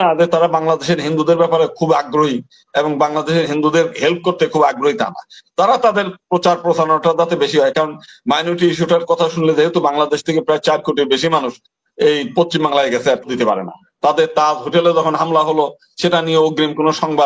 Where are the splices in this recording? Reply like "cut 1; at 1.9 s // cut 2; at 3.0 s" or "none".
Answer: cut 1; at 13.2 s